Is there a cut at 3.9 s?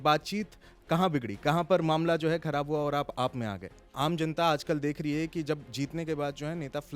yes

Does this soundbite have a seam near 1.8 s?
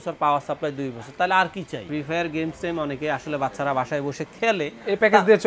yes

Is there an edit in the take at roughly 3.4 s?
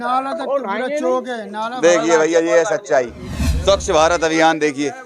yes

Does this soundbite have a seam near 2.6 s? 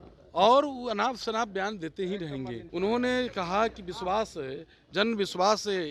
yes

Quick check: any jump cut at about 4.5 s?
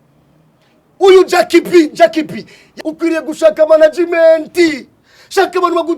no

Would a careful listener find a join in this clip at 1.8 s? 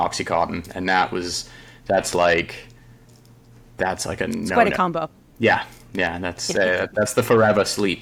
no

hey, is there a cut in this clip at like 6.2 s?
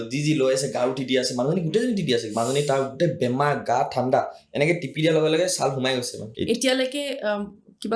yes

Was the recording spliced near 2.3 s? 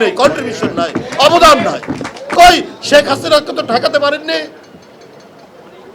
yes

